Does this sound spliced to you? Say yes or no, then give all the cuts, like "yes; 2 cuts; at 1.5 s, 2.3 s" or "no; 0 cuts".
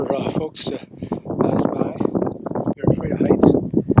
yes; 1 cut; at 2.8 s